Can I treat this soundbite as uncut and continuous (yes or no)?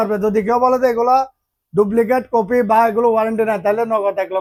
yes